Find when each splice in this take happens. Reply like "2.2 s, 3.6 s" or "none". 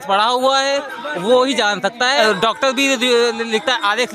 2.2 s

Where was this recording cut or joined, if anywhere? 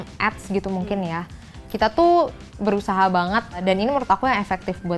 3.6 s

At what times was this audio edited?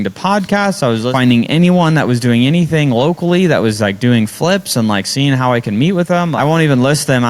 1.1 s, 6.3 s

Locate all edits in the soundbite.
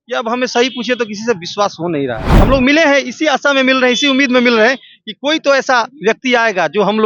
2.2 s

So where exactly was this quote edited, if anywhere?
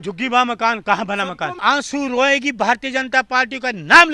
1.5 s

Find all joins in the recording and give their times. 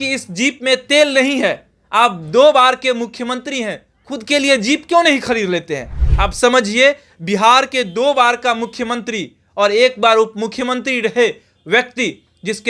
none

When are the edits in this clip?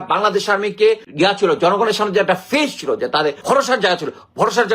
1.1 s, 3.4 s

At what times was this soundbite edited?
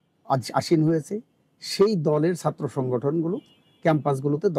none

